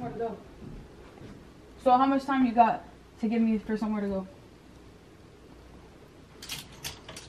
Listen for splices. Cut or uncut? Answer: uncut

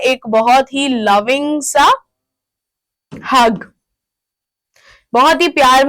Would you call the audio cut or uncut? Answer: uncut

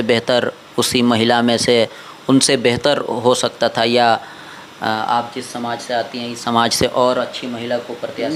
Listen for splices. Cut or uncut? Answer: uncut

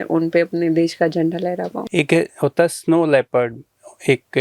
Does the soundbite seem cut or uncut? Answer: cut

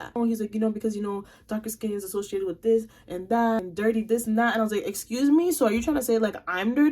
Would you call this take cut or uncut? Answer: cut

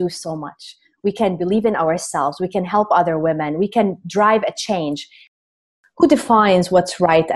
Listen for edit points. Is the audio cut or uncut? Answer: cut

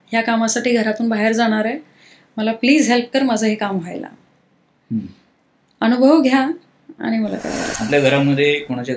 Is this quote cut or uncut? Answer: cut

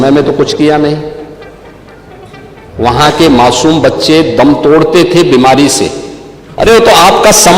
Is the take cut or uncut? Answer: cut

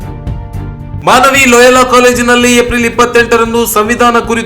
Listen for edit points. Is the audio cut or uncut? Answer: cut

